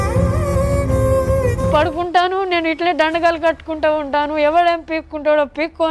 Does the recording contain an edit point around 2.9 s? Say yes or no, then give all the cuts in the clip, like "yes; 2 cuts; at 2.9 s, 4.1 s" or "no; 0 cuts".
no; 1 cut; at 1.7 s